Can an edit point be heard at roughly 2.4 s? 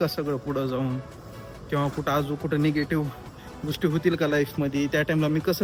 no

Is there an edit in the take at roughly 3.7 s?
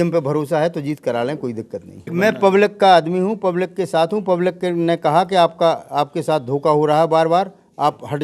no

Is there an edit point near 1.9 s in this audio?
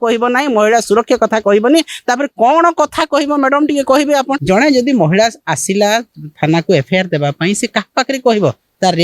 no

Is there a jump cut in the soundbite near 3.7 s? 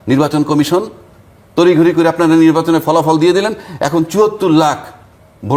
no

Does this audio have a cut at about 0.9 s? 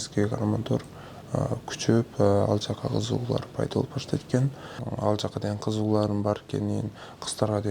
no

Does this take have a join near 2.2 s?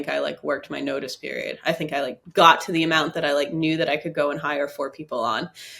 yes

